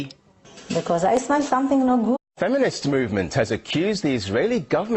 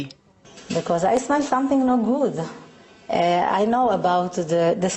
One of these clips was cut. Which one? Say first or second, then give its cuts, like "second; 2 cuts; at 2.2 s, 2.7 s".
second; 1 cut; at 2.2 s